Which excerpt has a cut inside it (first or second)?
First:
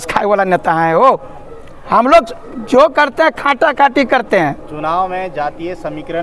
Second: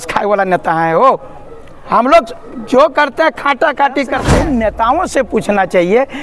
second